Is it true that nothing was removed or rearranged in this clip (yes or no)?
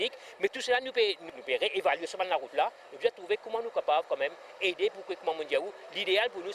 yes